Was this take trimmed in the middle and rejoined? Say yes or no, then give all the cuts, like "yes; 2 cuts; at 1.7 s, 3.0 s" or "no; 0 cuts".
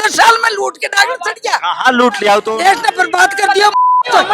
yes; 1 cut; at 2.5 s